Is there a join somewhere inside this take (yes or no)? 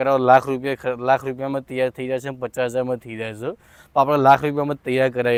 no